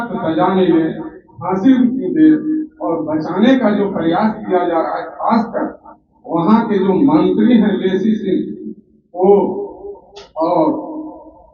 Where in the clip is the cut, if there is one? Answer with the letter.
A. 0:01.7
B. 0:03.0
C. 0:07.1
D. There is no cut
D